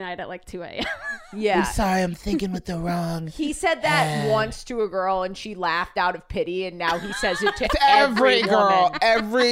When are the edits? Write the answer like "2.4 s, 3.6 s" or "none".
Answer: none